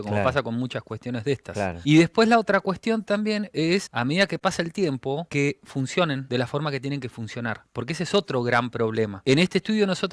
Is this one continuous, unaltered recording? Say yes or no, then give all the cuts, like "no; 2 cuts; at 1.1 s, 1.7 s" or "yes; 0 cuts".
no; 5 cuts; at 1.8 s, 3.9 s, 5.3 s, 6.2 s, 9.2 s